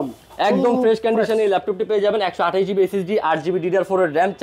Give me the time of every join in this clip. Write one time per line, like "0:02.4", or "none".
none